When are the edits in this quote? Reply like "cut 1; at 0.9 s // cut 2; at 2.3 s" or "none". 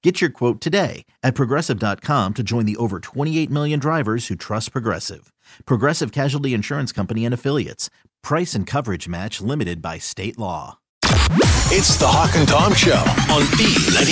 cut 1; at 10.9 s